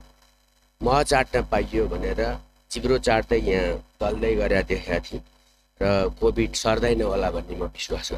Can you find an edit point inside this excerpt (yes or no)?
no